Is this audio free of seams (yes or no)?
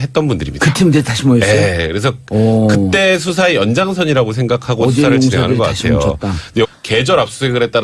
yes